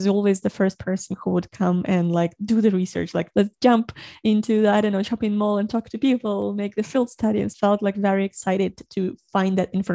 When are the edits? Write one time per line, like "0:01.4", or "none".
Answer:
0:03.3
0:07.5

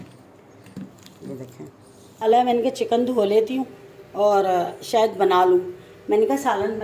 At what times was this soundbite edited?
0:02.0

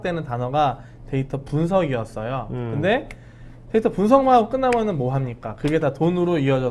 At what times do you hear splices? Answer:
none

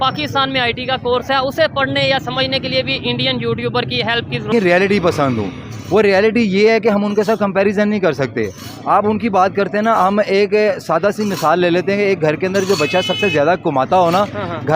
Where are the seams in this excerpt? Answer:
0:04.5

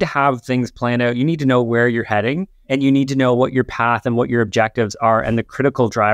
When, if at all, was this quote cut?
0:02.5

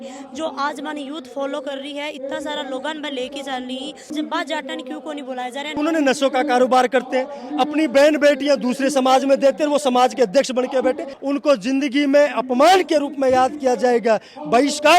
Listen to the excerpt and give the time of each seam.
0:04.1
0:05.7
0:11.1

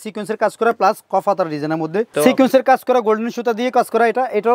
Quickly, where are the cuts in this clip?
0:02.1

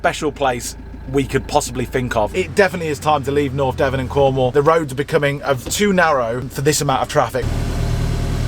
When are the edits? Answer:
0:02.3
0:06.5
0:07.5

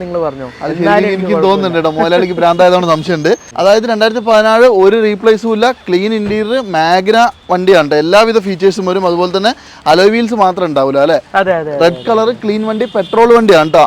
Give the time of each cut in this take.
0:03.5

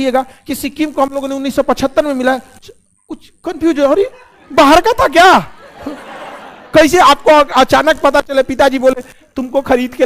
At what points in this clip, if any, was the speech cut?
none

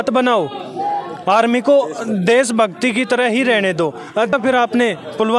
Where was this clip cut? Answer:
0:04.3

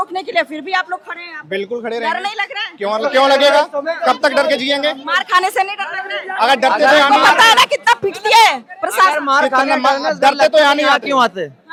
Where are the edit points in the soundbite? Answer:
none

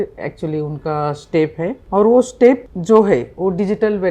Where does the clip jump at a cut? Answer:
0:01.8
0:02.7

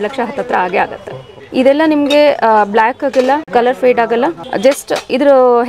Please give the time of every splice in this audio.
0:01.3
0:03.4
0:04.4

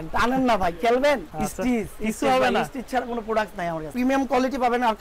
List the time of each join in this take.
0:01.3
0:03.9

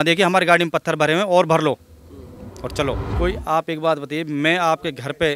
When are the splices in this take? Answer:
0:03.1

